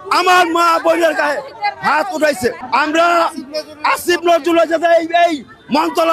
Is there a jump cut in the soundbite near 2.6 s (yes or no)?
yes